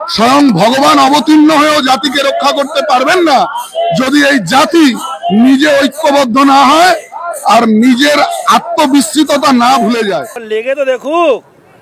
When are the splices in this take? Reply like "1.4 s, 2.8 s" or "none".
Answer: 10.3 s